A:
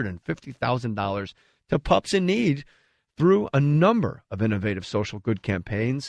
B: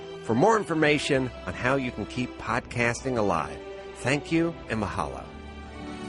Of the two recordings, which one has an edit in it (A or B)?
B